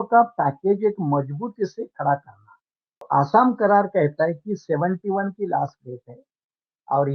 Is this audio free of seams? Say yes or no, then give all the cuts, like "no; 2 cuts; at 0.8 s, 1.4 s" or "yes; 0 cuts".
no; 1 cut; at 3.0 s